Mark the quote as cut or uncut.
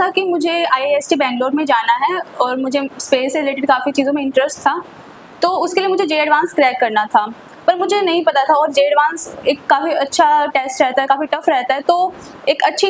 uncut